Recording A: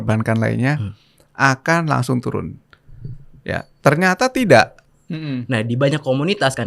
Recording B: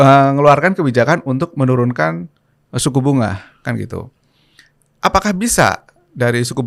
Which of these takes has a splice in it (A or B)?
A